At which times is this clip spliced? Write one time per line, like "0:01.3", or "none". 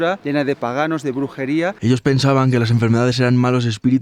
0:01.7